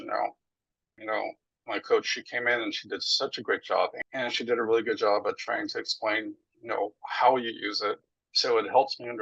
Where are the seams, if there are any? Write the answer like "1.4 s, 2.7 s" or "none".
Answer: 1.0 s, 4.0 s